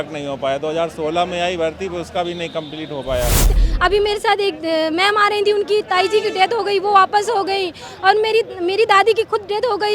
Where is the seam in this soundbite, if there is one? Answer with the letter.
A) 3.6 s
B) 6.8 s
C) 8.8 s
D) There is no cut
A